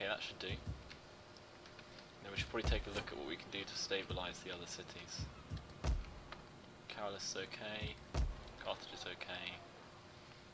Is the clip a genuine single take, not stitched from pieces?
yes; 0 cuts

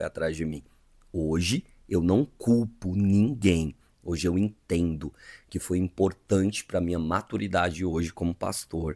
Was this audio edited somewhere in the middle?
no; 0 cuts

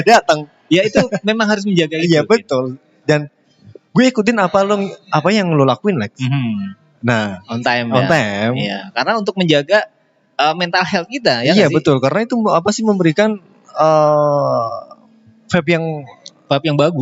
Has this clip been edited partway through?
no; 0 cuts

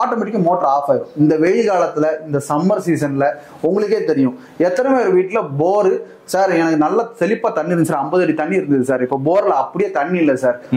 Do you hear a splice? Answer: no; 0 cuts

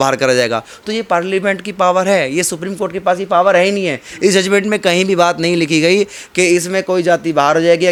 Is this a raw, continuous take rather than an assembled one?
yes; 0 cuts

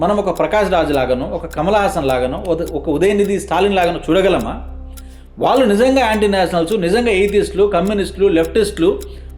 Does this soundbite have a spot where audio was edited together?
no; 0 cuts

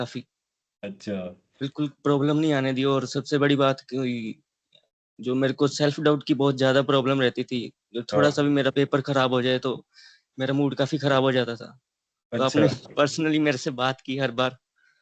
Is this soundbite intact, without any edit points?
yes; 0 cuts

